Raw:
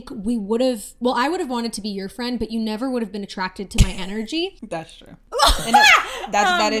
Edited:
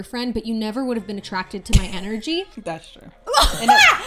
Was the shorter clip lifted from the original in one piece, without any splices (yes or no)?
yes